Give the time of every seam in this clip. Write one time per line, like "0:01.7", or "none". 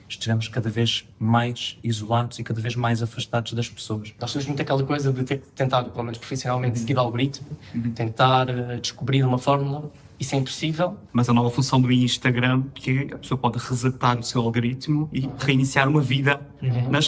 0:04.2
0:11.0

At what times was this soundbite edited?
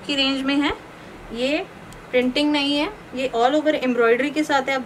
none

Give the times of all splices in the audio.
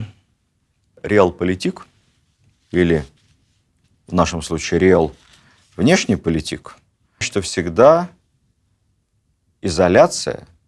0:07.3

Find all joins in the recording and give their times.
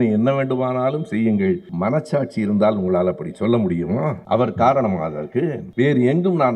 0:01.7
0:04.2
0:05.6

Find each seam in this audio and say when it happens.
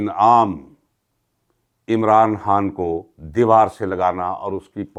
none

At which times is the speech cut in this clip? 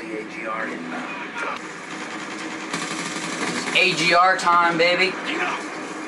0:01.6

